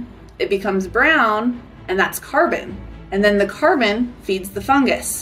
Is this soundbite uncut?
yes; 0 cuts

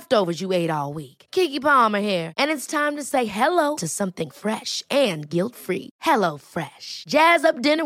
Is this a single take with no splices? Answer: yes; 0 cuts

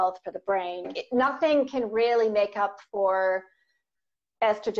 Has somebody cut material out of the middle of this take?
yes; 1 cut; at 1.0 s

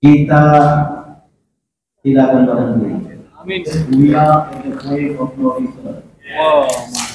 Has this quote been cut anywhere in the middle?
yes; 1 cut; at 3.8 s

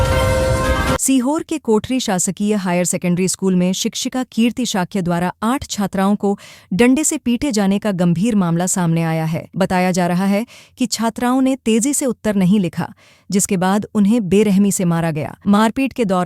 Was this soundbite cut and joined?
yes; 1 cut; at 1.0 s

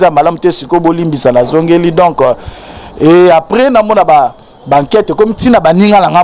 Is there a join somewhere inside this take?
no; 0 cuts

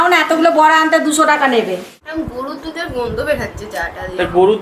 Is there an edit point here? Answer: yes; 1 cut; at 1.9 s

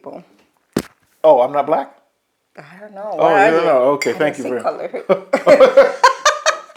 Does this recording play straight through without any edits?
yes; 0 cuts

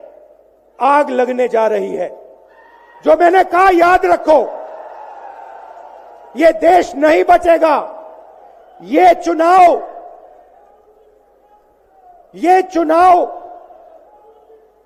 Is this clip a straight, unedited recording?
yes; 0 cuts

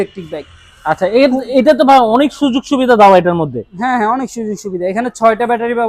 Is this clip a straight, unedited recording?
yes; 0 cuts

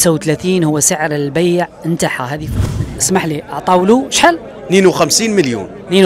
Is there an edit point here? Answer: yes; 1 cut; at 2.6 s

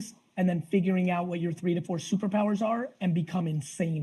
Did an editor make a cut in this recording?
no; 0 cuts

